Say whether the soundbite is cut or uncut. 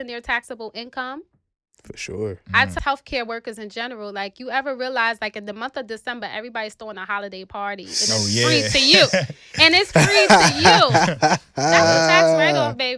cut